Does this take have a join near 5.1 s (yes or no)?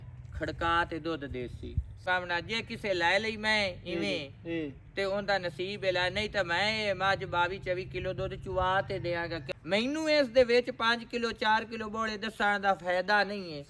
no